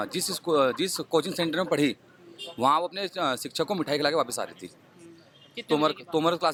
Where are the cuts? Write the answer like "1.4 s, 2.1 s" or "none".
none